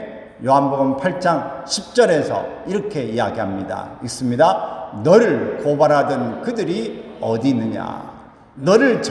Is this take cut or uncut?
uncut